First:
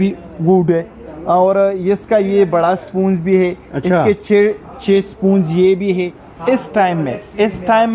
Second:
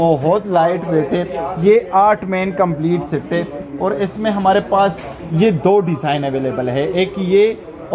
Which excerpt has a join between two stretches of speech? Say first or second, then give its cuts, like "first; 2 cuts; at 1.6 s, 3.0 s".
first; 1 cut; at 6.2 s